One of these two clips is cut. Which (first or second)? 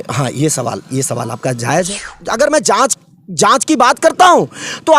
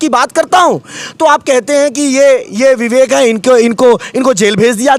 first